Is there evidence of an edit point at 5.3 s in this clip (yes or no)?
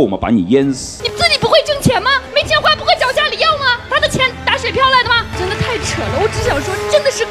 yes